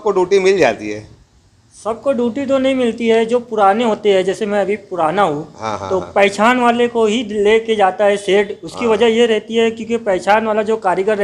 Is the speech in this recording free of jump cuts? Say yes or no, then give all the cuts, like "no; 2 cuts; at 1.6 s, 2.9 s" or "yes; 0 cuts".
yes; 0 cuts